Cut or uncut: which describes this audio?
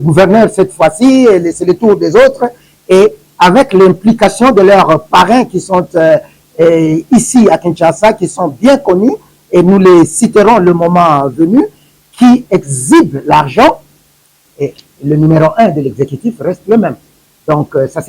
cut